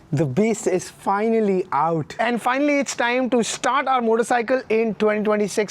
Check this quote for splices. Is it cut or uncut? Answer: cut